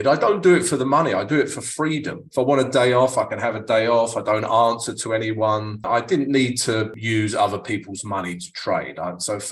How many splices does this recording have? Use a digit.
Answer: 3